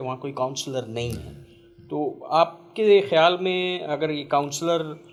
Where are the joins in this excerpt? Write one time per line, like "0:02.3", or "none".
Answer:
none